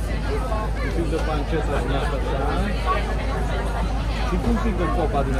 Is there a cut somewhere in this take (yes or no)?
no